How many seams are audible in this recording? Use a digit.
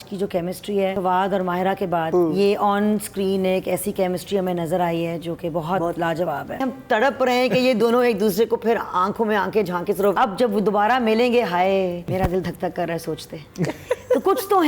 5